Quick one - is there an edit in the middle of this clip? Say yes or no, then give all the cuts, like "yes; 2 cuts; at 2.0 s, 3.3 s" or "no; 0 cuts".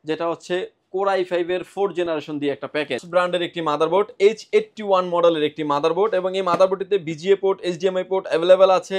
yes; 1 cut; at 3.0 s